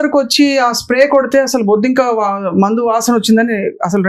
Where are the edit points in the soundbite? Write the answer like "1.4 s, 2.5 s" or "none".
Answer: none